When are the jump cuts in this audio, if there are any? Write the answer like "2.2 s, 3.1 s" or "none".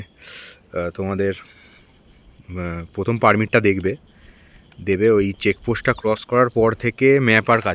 none

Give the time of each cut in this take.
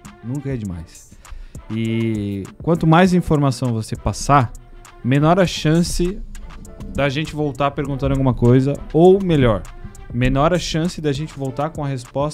none

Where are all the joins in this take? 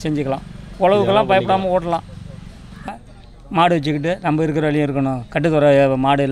2.9 s

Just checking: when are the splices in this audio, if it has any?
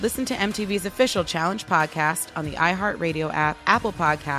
none

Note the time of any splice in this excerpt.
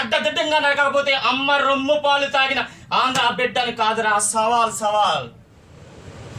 5.5 s

